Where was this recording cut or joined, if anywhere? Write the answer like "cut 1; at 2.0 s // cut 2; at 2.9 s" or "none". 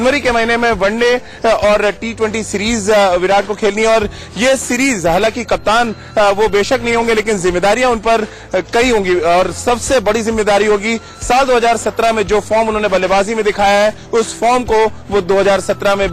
cut 1; at 1.9 s